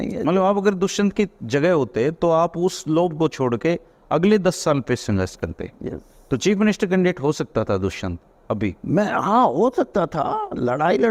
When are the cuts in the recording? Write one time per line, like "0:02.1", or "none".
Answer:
none

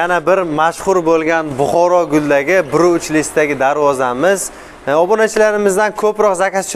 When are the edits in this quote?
none

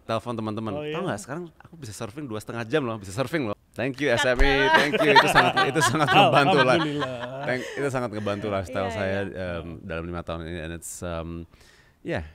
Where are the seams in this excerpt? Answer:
0:03.6

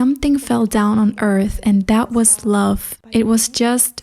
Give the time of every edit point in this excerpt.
0:02.9

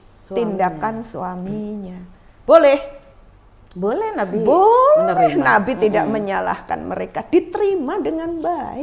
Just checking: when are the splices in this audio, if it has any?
none

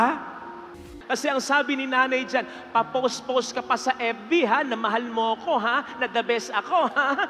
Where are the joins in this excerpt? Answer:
0:00.9

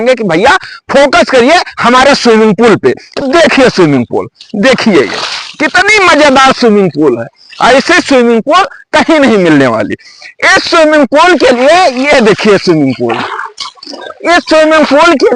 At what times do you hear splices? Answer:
none

